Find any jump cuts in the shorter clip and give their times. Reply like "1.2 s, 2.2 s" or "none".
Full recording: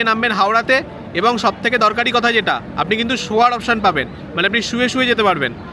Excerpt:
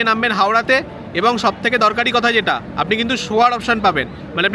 none